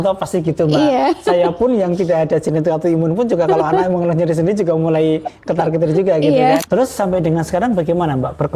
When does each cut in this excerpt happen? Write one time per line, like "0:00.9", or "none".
0:06.6